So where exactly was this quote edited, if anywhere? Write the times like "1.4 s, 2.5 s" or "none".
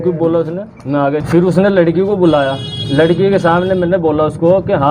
1.2 s